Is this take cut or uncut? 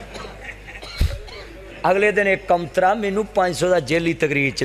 cut